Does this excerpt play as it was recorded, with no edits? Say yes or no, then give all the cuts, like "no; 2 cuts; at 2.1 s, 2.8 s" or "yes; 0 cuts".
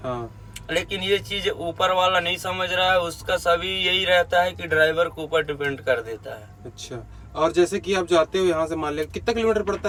yes; 0 cuts